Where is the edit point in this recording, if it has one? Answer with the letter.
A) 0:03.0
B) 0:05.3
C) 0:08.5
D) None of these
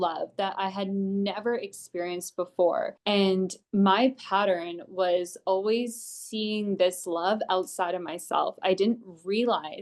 A